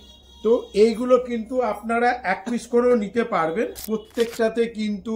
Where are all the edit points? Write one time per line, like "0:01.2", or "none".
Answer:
0:03.7